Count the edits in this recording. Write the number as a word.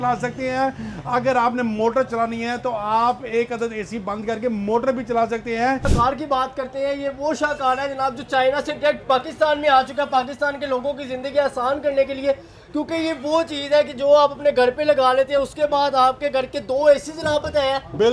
one